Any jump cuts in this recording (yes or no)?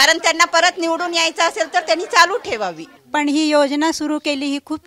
yes